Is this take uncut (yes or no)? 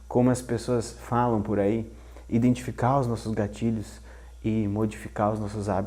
yes